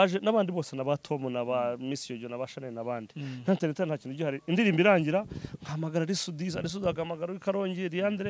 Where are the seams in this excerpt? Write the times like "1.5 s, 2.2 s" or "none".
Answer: none